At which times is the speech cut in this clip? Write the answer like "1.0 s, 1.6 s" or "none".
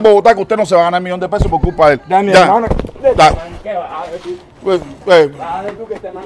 none

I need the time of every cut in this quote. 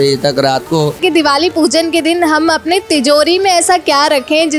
1.0 s

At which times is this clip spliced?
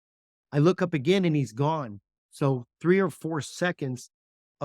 none

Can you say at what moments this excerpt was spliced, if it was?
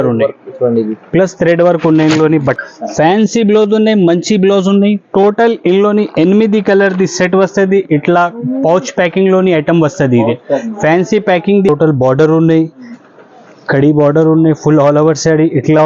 2.6 s, 11.7 s

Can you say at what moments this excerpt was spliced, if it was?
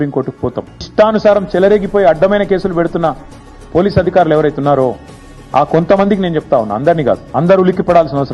0.9 s, 7.2 s

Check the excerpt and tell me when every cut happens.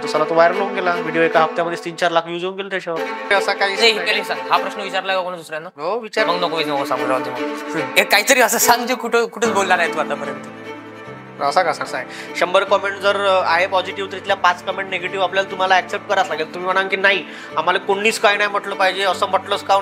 3.3 s, 12.1 s

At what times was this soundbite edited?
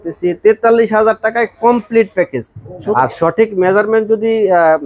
2.9 s

